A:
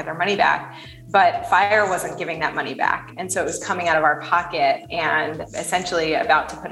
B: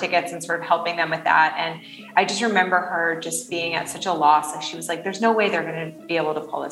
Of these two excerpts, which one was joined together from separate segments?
A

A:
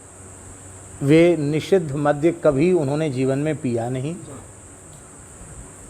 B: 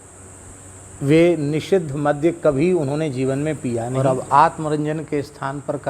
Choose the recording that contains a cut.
B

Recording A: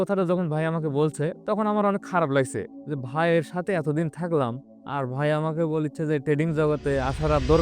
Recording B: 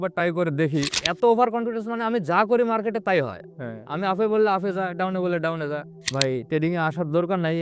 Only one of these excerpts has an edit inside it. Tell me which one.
B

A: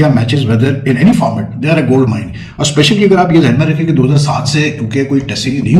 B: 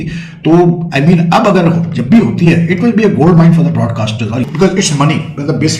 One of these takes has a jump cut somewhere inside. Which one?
B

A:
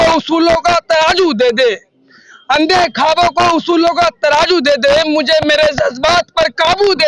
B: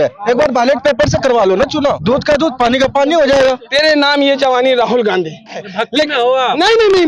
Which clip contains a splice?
B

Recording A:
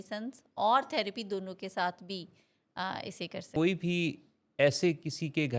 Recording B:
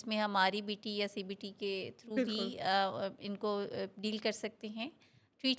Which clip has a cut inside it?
A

